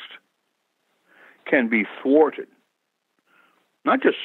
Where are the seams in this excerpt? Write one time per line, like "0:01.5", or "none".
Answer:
none